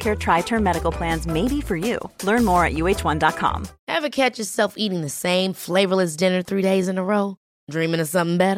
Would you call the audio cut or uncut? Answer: cut